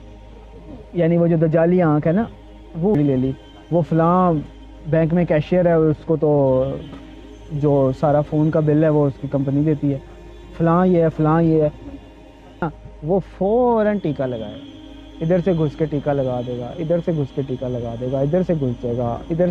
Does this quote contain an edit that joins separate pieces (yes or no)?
yes